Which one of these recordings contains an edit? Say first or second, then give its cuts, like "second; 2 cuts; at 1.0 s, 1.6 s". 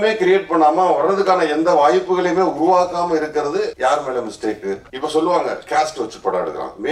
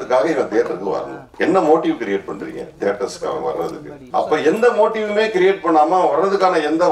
first; 2 cuts; at 3.7 s, 4.9 s